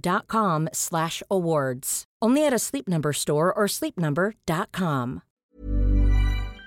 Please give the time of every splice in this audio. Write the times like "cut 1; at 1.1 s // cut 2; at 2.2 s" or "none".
cut 1; at 5.4 s